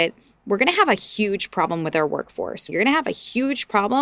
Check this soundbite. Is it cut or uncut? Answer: cut